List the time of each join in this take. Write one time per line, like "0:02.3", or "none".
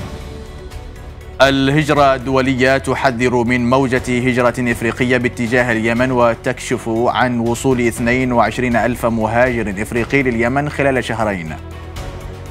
0:01.4
0:11.6